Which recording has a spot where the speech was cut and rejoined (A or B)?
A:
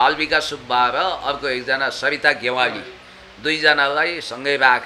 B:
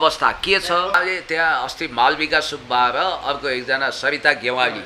B